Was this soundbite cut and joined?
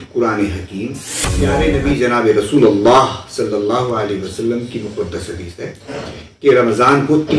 yes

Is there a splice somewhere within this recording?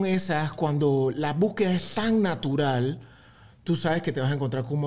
no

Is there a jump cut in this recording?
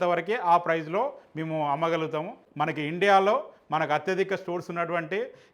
yes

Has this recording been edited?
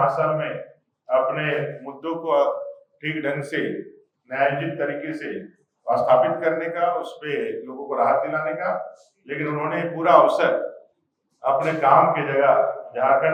no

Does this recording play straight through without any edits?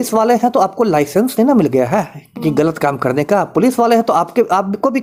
yes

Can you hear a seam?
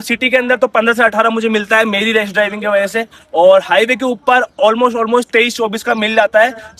no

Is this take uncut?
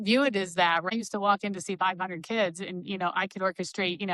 no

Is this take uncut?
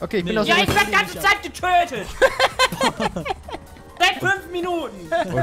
yes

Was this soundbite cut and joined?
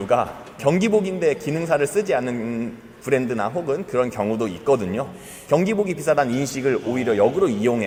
no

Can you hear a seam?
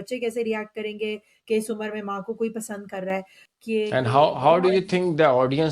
yes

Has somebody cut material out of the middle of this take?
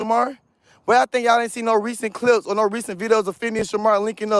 no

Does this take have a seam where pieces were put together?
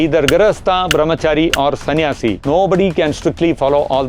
yes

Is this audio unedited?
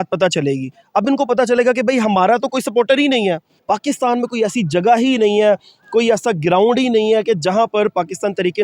no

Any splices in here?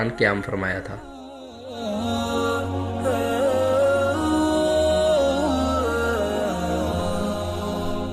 no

